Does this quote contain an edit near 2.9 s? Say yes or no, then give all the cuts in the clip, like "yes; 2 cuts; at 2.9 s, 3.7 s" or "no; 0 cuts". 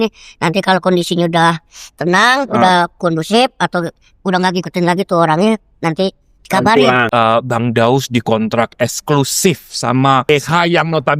no; 2 cuts; at 7.1 s, 10.3 s